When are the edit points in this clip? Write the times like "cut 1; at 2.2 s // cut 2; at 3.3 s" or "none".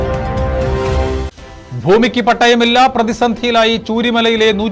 cut 1; at 1.0 s